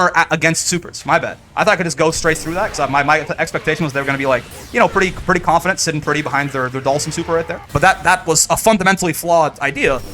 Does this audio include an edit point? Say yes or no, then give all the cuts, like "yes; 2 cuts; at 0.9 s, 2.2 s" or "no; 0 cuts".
yes; 1 cut; at 7.6 s